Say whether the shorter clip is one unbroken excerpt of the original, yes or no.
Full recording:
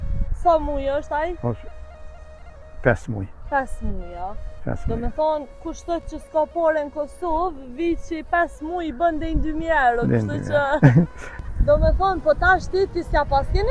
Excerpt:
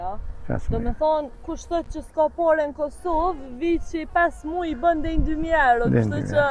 yes